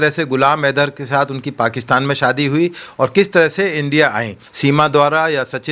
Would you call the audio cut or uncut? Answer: cut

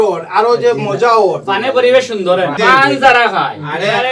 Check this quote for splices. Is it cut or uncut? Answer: cut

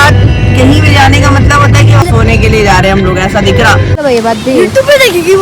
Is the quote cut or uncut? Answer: cut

